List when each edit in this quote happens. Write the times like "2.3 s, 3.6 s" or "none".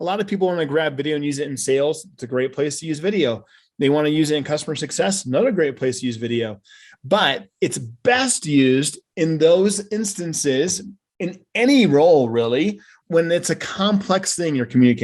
12.9 s